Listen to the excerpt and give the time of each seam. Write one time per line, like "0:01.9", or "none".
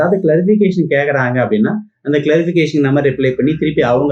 none